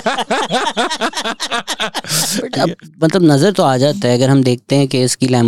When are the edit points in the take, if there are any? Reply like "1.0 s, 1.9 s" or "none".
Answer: 2.5 s